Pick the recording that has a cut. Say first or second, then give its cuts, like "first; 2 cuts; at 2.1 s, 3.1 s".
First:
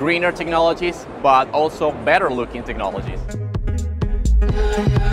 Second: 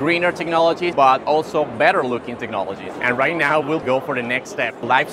second; 2 cuts; at 0.9 s, 2.9 s